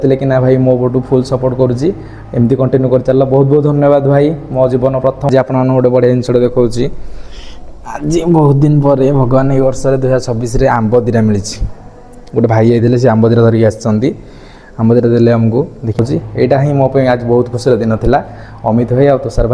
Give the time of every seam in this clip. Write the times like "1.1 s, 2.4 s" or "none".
5.3 s, 16.0 s